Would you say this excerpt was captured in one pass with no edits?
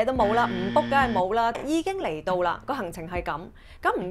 no; 1 cut; at 1.6 s

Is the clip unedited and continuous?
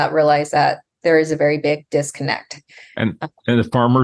yes; 0 cuts

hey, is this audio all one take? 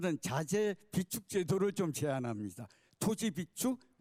yes; 0 cuts

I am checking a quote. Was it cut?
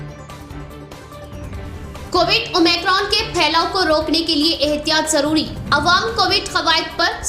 yes; 1 cut; at 1.6 s

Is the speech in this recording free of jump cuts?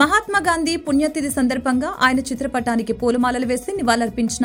yes; 0 cuts

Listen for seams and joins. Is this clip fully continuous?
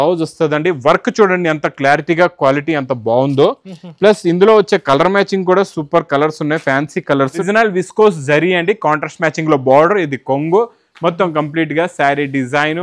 no; 1 cut; at 7.5 s

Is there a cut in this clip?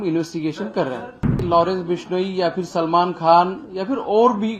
yes; 1 cut; at 1.4 s

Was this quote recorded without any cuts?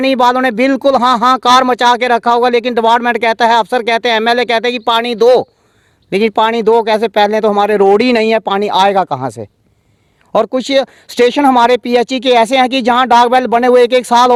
yes; 0 cuts

